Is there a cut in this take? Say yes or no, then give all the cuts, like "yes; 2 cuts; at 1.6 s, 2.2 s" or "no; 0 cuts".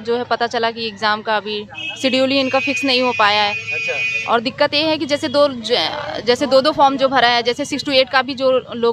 no; 0 cuts